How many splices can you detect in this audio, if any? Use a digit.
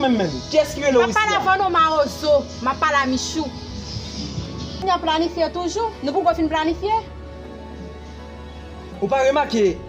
0